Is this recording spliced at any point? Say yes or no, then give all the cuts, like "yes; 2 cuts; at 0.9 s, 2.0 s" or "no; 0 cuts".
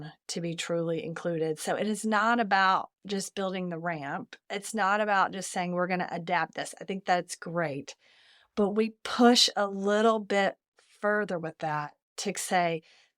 no; 0 cuts